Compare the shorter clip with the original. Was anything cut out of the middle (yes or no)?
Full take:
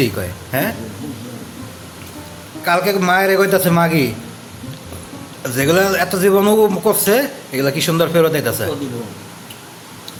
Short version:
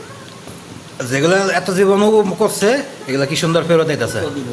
no